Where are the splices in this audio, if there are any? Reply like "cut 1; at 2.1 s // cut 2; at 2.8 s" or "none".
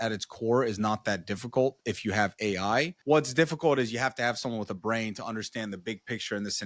cut 1; at 3.0 s